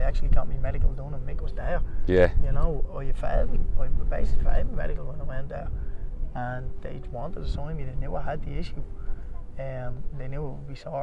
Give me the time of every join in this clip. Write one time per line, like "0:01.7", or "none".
none